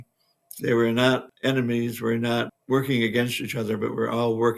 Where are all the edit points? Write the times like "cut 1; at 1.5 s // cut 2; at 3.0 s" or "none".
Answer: cut 1; at 1.3 s

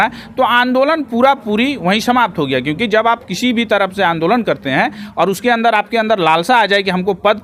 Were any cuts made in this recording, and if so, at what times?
none

